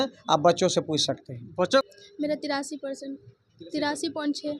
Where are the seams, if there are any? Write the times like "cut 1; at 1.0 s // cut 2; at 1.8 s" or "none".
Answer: cut 1; at 1.8 s